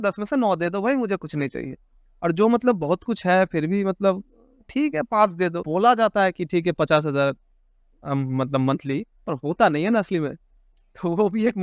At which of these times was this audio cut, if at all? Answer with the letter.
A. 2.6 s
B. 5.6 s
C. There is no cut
B